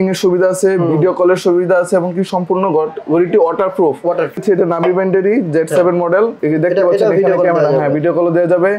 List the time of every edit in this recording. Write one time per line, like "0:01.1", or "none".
0:04.4
0:06.4